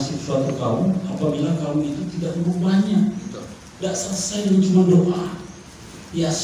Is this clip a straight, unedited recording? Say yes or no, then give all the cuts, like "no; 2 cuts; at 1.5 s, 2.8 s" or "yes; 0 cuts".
yes; 0 cuts